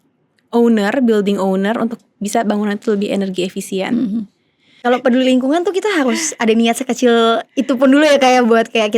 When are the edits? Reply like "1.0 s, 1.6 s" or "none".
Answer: 4.8 s